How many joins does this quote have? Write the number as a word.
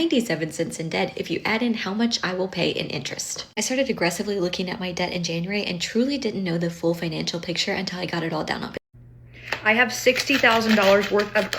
one